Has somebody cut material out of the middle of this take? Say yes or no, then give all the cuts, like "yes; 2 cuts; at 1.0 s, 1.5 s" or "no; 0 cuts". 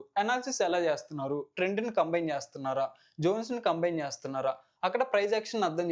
no; 0 cuts